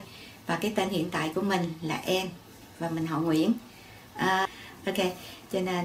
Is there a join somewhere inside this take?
yes; 1 cut; at 4.5 s

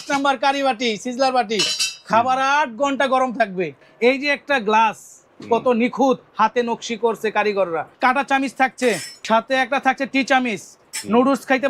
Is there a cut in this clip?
yes; 3 cuts; at 3.8 s, 7.9 s, 9.1 s

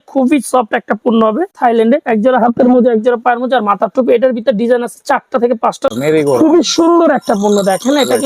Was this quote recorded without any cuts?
no; 2 cuts; at 1.5 s, 5.8 s

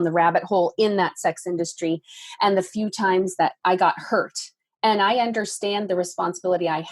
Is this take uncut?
no; 1 cut; at 3.6 s

